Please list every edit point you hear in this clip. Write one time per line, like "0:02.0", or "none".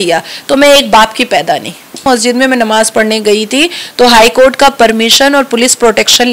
0:02.0